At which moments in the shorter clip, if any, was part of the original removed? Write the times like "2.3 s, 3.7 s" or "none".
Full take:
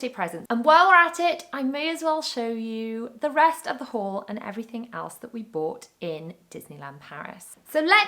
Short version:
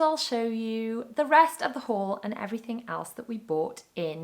none

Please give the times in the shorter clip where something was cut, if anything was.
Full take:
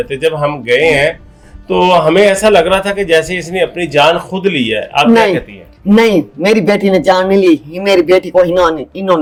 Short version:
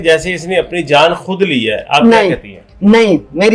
none

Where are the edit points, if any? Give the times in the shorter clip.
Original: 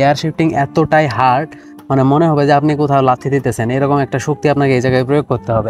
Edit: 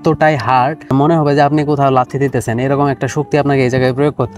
0.9 s

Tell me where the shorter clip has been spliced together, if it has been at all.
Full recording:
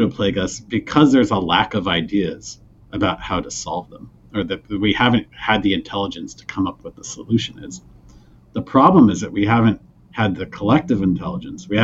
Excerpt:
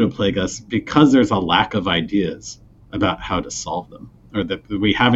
none

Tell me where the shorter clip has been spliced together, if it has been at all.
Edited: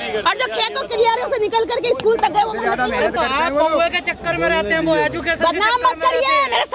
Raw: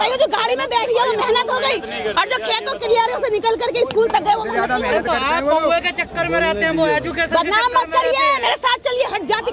none

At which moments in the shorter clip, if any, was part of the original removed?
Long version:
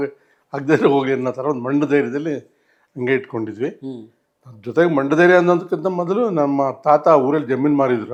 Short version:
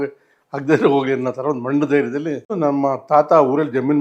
2.5 s

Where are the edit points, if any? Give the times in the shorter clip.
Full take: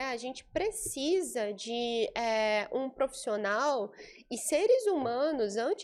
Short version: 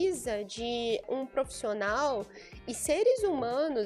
1.0 s

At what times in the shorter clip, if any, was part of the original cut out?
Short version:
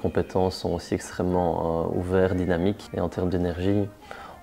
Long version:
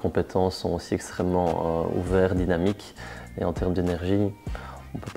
2.8 s

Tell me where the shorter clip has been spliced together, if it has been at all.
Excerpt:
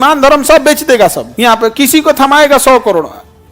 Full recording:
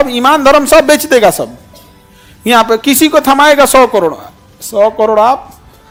1.2 s

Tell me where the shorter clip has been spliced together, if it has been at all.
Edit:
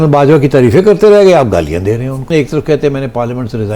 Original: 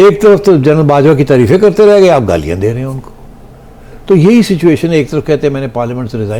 2.3 s

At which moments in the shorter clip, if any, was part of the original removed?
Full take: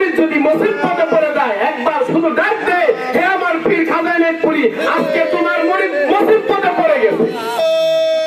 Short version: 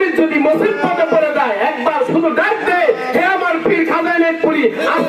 none

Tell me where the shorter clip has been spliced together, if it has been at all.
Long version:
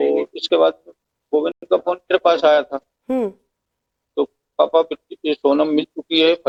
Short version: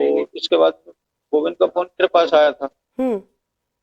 1.5 s

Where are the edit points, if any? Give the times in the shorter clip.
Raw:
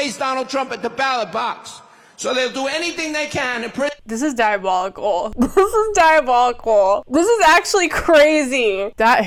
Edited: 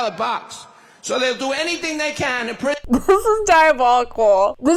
2.8 s

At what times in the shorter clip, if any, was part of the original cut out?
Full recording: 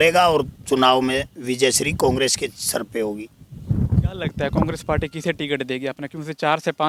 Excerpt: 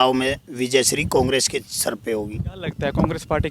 2.6 s

